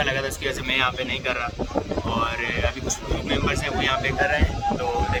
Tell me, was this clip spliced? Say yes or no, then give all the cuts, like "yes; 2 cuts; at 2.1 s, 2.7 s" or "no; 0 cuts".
no; 0 cuts